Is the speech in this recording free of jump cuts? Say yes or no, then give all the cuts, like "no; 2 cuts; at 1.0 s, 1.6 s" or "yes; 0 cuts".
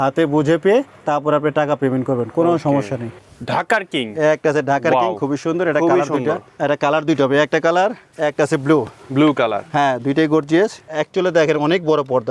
no; 4 cuts; at 3.0 s, 6.5 s, 8.1 s, 10.8 s